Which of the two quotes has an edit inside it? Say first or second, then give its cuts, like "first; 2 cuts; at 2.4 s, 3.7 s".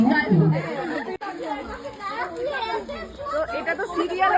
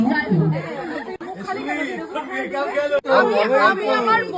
first; 1 cut; at 1.2 s